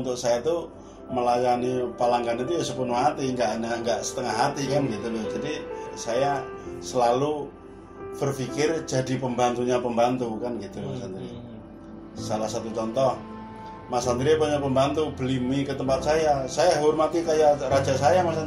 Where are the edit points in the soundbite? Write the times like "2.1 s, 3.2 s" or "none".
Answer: none